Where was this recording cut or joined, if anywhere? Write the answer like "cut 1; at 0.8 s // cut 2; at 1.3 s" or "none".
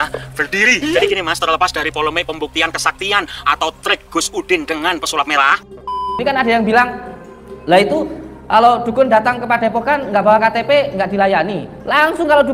cut 1; at 5.9 s